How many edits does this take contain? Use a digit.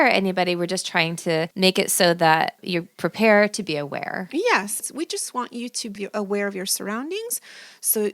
2